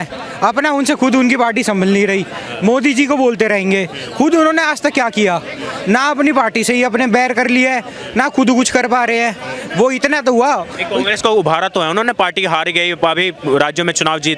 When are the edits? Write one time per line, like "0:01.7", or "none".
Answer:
none